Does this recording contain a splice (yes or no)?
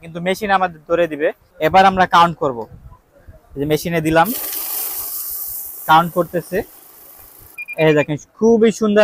yes